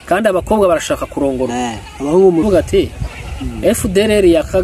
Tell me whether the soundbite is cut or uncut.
cut